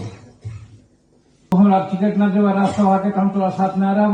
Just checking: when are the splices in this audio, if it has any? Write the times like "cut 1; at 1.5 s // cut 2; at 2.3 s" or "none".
cut 1; at 1.5 s

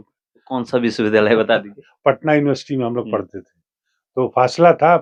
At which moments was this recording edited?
none

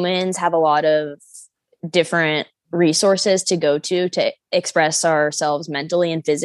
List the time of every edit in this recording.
cut 1; at 4.4 s

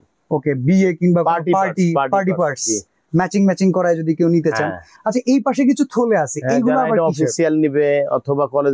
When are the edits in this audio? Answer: none

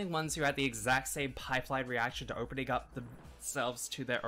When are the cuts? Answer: none

